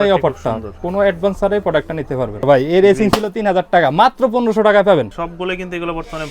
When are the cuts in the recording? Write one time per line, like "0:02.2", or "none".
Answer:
0:02.4
0:05.1